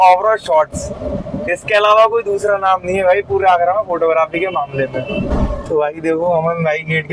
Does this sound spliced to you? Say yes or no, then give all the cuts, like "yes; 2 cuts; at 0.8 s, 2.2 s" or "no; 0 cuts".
yes; 1 cut; at 5.3 s